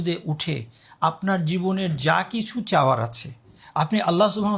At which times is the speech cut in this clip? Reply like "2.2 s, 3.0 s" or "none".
none